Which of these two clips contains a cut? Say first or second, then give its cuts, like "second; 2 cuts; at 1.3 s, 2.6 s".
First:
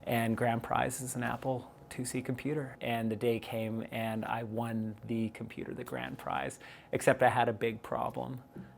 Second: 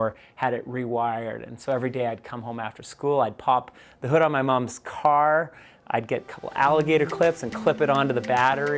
first; 1 cut; at 2.8 s